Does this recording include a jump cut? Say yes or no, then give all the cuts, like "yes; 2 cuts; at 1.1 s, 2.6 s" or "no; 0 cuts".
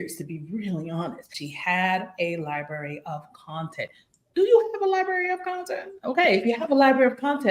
yes; 1 cut; at 1.3 s